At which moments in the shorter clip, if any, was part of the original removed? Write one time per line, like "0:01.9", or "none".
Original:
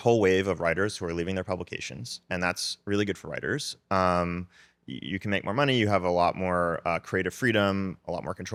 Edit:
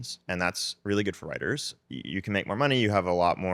0:01.7

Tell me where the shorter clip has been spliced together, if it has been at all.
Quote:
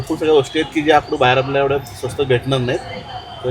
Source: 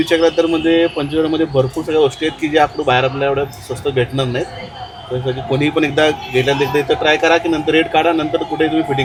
none

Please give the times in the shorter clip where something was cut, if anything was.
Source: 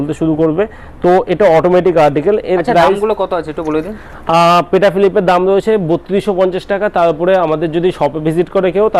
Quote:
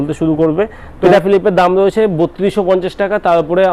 0:01.1

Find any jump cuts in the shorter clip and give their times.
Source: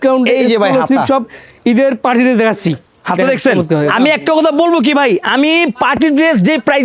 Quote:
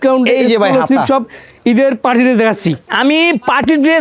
0:02.9

